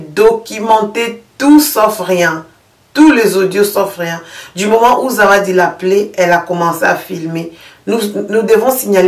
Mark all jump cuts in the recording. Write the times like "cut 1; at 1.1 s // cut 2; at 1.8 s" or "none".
none